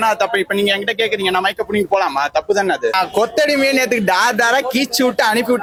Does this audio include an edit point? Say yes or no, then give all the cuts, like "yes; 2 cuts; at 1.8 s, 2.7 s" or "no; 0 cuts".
no; 0 cuts